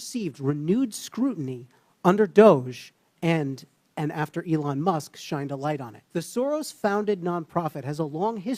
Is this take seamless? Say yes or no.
no